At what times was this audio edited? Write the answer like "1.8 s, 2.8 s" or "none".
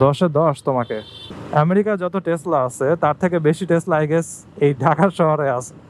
1.2 s